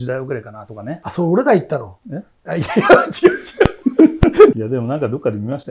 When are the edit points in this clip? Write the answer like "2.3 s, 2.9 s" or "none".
1.0 s, 4.6 s